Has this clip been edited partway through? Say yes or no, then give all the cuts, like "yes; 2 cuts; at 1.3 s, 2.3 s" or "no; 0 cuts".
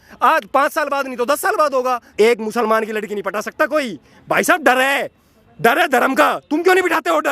yes; 1 cut; at 2.1 s